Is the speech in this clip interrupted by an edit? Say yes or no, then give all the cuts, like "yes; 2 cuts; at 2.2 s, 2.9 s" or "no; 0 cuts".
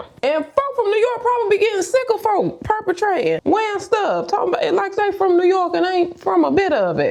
no; 0 cuts